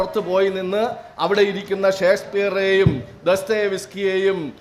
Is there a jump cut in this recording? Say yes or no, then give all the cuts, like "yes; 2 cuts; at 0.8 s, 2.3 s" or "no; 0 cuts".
no; 0 cuts